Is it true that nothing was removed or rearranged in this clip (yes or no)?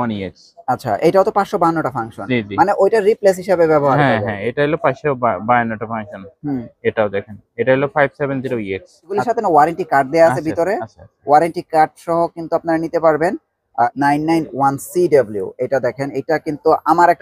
no